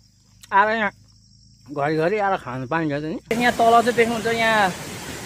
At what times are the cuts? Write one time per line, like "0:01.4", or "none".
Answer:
0:03.3